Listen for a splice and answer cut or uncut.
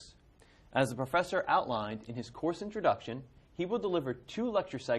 cut